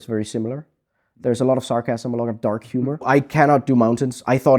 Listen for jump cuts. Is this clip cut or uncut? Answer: cut